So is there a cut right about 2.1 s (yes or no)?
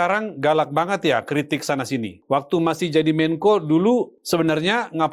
yes